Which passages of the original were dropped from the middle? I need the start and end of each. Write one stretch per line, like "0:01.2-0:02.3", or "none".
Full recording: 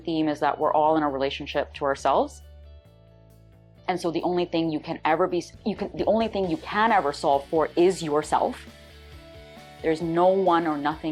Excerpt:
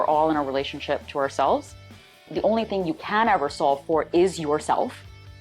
0:02.9-0:05.9